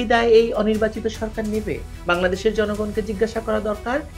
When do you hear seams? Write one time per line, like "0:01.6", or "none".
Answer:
none